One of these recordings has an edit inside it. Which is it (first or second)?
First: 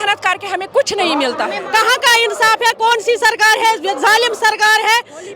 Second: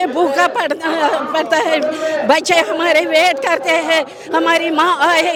first